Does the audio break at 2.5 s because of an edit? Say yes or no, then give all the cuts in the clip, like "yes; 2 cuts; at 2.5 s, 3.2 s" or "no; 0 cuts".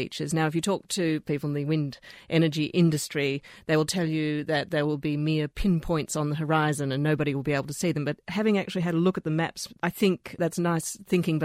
no; 2 cuts; at 1.2 s, 9.7 s